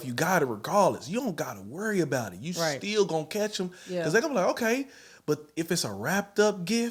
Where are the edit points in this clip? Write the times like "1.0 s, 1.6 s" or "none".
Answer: none